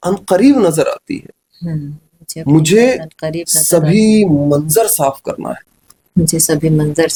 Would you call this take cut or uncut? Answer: uncut